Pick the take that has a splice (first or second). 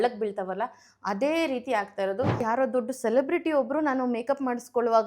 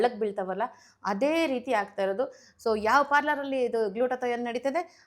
first